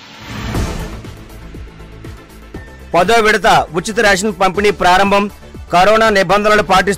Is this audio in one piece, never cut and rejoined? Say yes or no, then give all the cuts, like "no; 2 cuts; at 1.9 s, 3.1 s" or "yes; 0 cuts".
no; 1 cut; at 1.1 s